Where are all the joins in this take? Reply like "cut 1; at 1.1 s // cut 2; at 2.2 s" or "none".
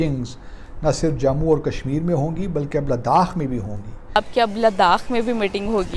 cut 1; at 4.2 s